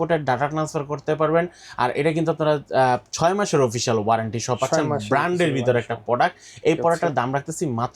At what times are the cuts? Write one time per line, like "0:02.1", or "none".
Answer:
none